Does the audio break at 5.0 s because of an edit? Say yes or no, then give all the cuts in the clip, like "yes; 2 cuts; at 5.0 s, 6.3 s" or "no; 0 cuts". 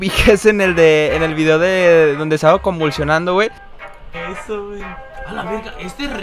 no; 1 cut; at 3.7 s